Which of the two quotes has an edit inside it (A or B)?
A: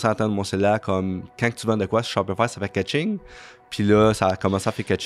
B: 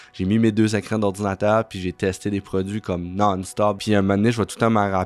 B